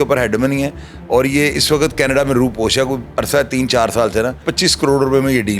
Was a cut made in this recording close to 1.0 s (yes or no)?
no